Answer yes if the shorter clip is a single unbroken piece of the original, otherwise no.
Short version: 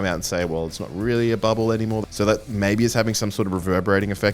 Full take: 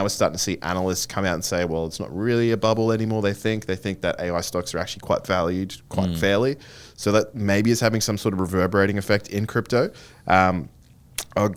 no